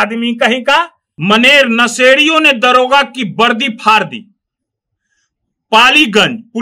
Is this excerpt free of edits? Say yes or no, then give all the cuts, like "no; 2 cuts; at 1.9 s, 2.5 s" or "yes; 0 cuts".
no; 1 cut; at 1.0 s